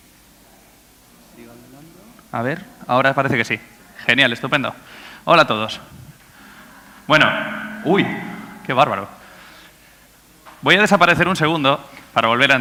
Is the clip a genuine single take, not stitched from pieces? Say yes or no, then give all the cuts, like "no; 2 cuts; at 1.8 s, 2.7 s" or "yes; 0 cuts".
yes; 0 cuts